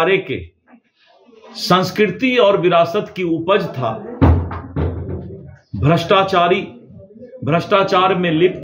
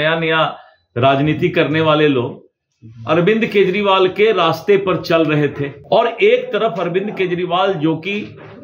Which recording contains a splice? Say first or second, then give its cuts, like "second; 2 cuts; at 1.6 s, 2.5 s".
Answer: second; 1 cut; at 5.7 s